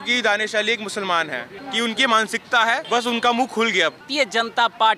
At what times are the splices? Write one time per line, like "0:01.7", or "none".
0:01.5
0:02.8
0:04.1